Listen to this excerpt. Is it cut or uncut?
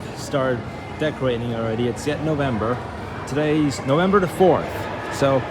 uncut